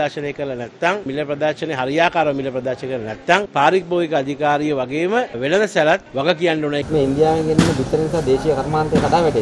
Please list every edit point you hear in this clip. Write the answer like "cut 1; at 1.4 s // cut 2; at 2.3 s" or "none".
cut 1; at 1.1 s // cut 2; at 3.5 s // cut 3; at 6.4 s